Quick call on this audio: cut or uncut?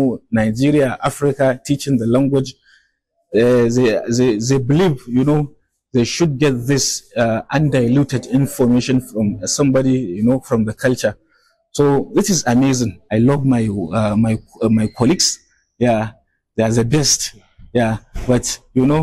cut